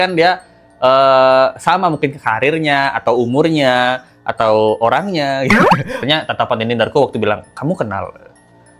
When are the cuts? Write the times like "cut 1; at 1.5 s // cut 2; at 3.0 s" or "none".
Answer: cut 1; at 6.0 s